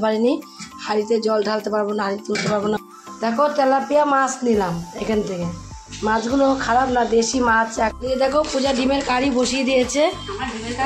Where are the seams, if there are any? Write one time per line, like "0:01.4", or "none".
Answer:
0:02.8
0:08.0